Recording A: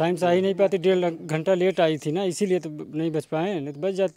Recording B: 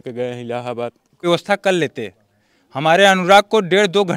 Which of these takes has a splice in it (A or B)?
B